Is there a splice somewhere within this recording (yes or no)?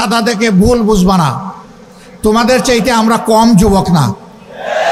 no